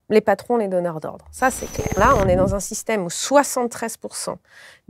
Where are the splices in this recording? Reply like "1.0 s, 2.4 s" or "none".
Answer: 2.0 s